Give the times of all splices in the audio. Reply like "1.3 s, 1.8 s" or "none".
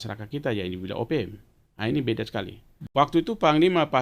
2.7 s

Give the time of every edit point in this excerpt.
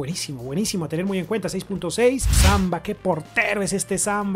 2.4 s

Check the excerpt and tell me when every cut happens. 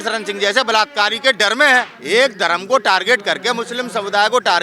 2.0 s

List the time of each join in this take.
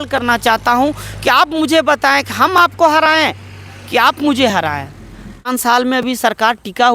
5.5 s

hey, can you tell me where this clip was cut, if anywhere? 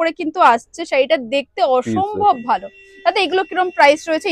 none

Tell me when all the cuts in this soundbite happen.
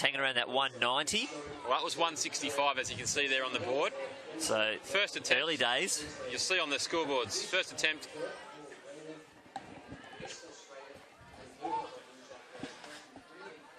1.8 s

